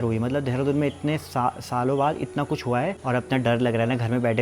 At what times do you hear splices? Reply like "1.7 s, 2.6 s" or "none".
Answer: 3.0 s